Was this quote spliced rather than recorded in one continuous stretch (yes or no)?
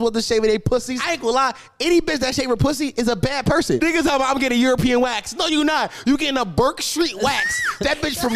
yes